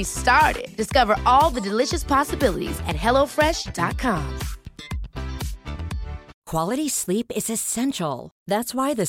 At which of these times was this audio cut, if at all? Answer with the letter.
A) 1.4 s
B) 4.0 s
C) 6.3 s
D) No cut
C